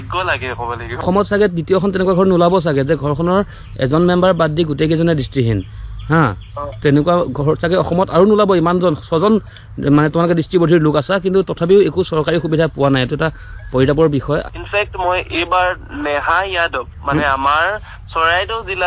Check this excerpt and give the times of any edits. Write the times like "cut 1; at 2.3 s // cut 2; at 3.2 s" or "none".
cut 1; at 1.0 s // cut 2; at 14.5 s